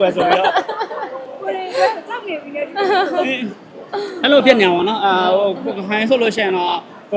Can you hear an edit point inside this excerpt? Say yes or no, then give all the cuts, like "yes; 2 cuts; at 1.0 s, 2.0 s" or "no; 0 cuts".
no; 0 cuts